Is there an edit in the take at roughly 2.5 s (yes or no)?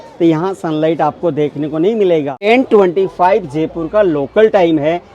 yes